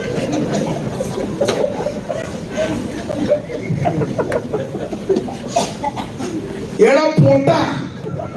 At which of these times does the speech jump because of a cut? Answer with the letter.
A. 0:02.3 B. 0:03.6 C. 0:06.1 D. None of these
D